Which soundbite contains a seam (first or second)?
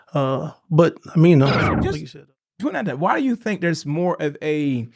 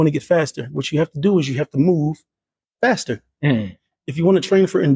first